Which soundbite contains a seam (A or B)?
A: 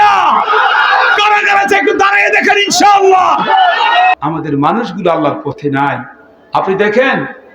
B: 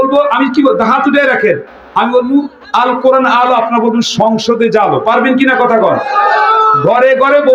A